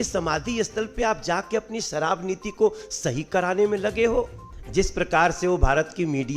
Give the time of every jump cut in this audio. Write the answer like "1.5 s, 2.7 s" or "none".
4.4 s